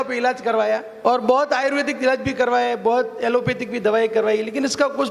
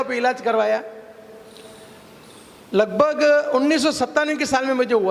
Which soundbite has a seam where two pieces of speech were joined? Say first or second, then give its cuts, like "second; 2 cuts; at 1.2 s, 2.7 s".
first; 1 cut; at 0.9 s